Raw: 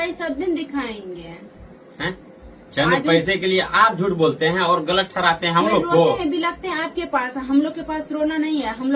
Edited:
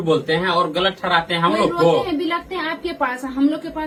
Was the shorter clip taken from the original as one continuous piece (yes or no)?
yes